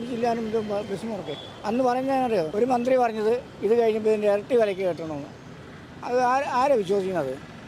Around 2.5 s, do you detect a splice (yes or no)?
yes